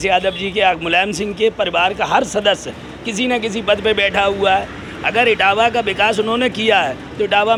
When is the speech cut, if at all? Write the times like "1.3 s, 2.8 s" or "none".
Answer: none